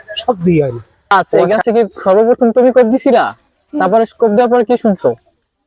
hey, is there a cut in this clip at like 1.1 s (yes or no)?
yes